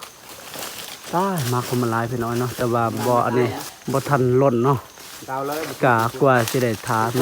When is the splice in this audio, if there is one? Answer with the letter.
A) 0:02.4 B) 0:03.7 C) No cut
B